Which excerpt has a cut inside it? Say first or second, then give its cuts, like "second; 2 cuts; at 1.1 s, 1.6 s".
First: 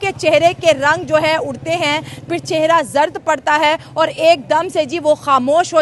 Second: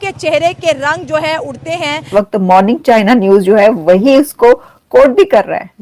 second; 1 cut; at 2.0 s